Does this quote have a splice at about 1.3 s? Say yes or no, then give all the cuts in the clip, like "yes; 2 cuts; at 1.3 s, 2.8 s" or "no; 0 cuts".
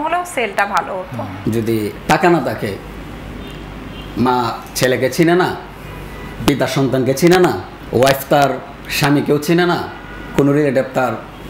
yes; 2 cuts; at 1.3 s, 7.7 s